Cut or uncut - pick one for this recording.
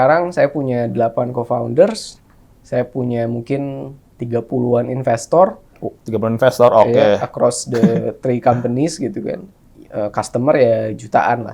uncut